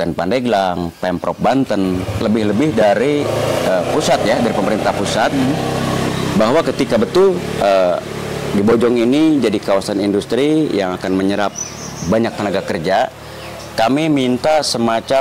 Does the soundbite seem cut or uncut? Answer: uncut